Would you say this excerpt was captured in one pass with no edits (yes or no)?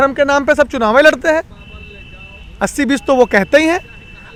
yes